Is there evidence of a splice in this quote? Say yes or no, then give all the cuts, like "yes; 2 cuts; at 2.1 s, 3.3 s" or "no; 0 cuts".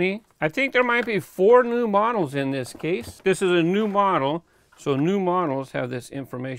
yes; 1 cut; at 3.2 s